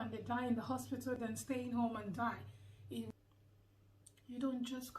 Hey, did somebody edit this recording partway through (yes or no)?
yes